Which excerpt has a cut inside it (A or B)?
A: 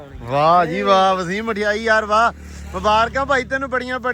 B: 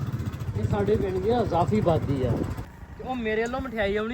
B